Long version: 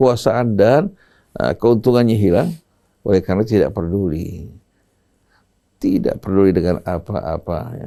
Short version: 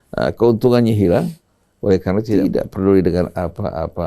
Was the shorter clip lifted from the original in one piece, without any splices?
no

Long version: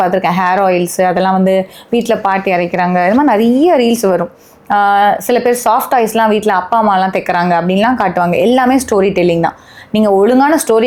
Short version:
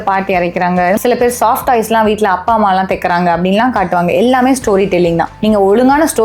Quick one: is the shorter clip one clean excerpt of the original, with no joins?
no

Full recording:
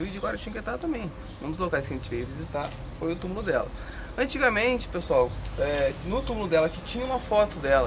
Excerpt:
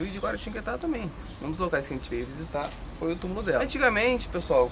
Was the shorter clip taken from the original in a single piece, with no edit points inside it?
no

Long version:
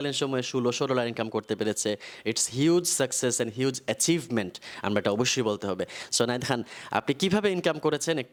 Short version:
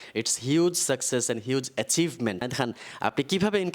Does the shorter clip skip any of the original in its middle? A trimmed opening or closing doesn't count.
yes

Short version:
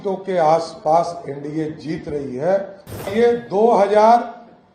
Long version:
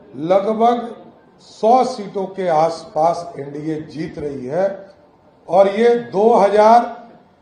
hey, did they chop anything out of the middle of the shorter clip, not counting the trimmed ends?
yes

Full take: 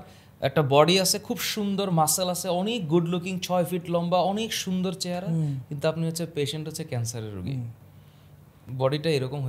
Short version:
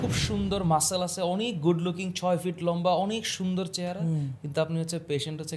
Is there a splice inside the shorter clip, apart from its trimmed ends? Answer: no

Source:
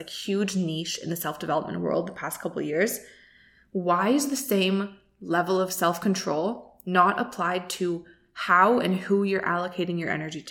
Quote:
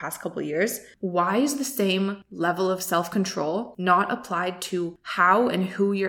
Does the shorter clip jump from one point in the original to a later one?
yes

